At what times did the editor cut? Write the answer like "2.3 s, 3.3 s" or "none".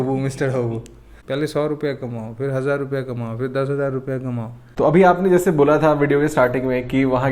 1.1 s, 4.6 s